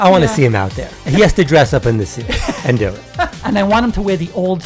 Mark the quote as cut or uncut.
cut